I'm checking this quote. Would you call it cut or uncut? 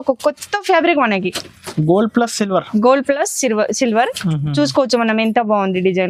uncut